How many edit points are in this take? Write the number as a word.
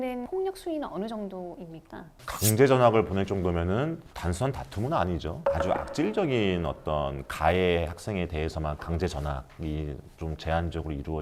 two